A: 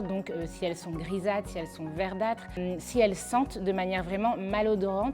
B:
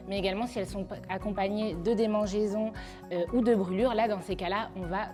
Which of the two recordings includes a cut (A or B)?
A